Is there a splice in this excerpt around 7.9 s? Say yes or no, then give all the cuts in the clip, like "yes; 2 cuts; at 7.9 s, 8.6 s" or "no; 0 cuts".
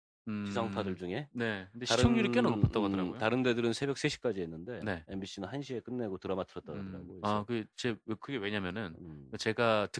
no; 1 cut; at 2.2 s